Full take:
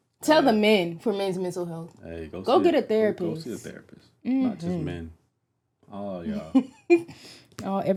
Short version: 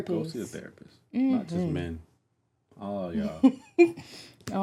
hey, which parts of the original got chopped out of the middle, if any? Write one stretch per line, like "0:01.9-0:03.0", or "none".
none

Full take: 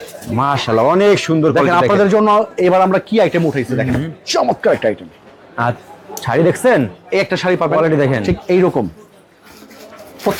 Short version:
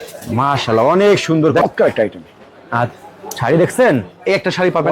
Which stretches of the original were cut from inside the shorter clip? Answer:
0:01.6-0:04.5

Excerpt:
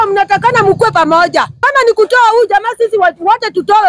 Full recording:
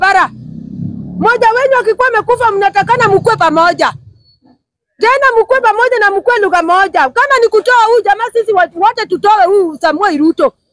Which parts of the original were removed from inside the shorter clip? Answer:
0:04.1-0:07.2

